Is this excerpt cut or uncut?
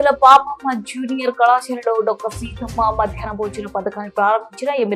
uncut